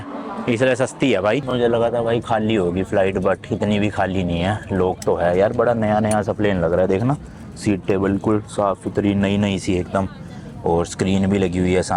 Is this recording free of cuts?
no; 1 cut; at 1.5 s

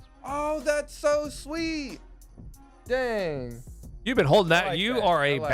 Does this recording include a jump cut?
no; 0 cuts

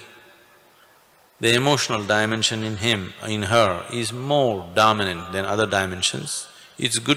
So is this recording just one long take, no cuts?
yes; 0 cuts

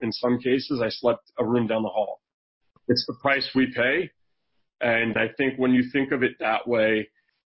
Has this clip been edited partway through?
yes; 3 cuts; at 1.3 s, 2.8 s, 5.1 s

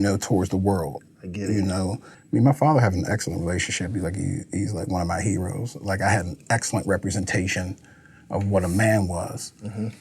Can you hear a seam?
yes; 1 cut; at 2.1 s

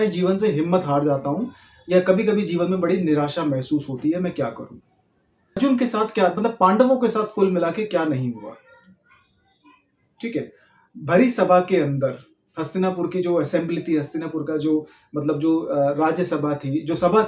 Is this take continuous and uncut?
no; 1 cut; at 5.6 s

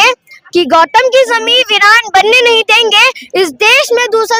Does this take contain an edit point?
no; 0 cuts

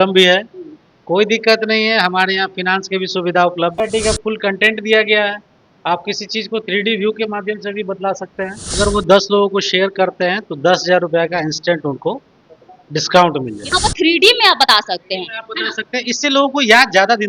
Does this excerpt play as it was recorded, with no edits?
no; 3 cuts; at 3.8 s, 8.8 s, 13.7 s

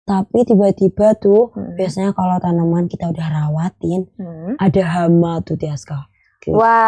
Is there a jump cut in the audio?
no; 0 cuts

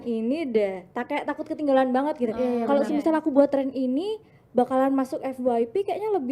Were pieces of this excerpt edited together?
no; 0 cuts

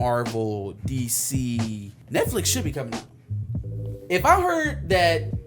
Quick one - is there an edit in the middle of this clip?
yes; 1 cut; at 1.9 s

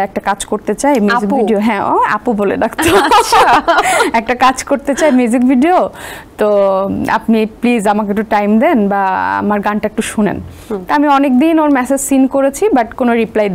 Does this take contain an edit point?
no; 0 cuts

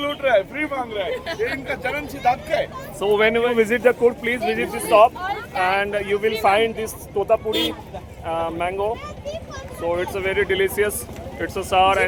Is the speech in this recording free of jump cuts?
yes; 0 cuts

